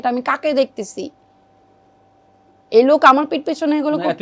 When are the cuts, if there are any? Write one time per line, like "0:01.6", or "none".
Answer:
none